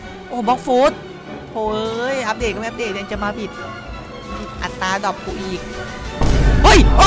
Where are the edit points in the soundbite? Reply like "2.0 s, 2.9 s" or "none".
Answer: none